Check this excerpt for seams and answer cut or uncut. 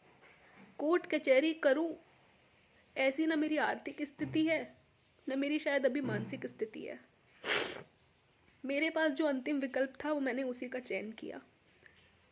uncut